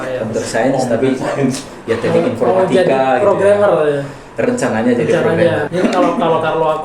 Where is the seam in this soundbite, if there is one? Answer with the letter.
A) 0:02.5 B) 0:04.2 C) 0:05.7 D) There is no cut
C